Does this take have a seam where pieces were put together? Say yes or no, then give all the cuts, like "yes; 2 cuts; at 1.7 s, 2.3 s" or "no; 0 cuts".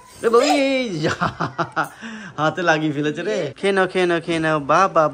yes; 1 cut; at 3.5 s